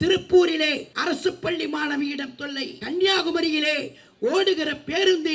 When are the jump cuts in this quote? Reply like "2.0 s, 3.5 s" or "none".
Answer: 0.9 s, 2.7 s